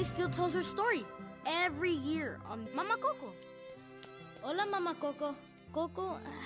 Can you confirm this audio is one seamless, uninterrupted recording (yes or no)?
no